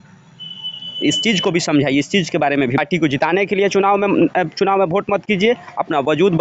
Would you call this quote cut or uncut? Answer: cut